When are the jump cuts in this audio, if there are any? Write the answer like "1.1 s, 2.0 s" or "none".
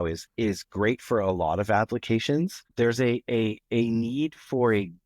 2.6 s